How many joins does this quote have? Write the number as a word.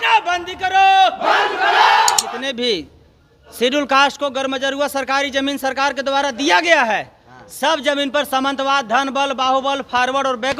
one